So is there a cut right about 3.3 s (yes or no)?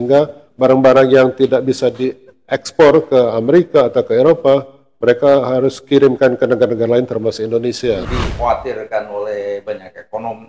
no